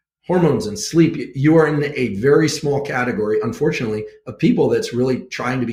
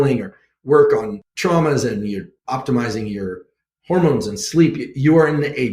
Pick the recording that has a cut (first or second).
second